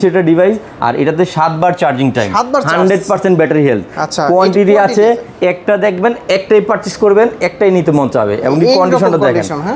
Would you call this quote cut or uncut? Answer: uncut